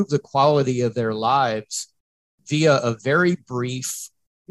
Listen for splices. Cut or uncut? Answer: uncut